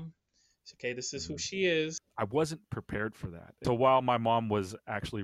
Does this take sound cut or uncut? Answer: cut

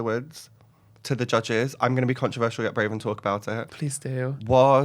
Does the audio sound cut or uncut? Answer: uncut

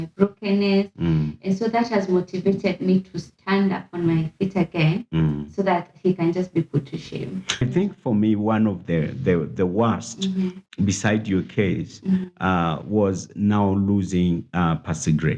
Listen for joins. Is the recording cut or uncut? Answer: cut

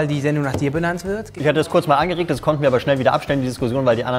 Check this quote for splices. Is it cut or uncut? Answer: uncut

